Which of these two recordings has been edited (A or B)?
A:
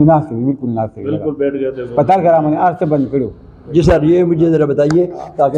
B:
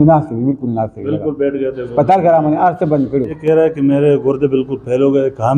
B